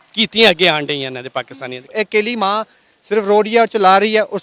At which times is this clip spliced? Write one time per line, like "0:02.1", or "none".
none